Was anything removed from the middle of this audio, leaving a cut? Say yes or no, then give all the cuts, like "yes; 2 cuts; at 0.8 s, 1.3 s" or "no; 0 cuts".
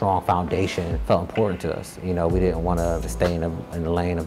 yes; 2 cuts; at 1.0 s, 3.1 s